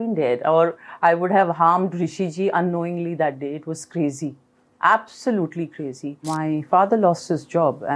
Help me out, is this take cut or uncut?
cut